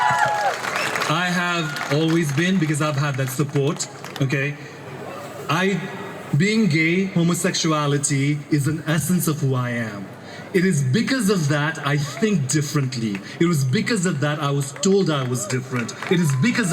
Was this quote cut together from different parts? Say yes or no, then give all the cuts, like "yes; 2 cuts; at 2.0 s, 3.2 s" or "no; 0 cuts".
no; 0 cuts